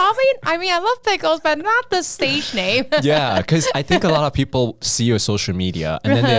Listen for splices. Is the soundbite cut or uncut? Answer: uncut